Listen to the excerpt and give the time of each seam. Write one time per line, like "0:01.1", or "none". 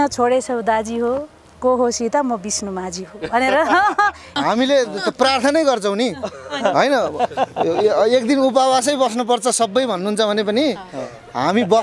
0:04.3